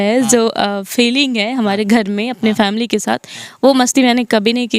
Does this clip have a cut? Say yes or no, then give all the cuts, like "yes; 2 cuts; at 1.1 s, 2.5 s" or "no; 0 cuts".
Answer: no; 0 cuts